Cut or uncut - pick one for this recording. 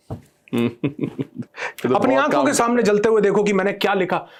uncut